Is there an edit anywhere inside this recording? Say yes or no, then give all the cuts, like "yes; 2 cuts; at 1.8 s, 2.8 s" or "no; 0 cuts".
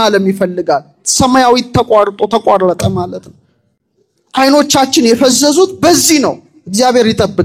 no; 0 cuts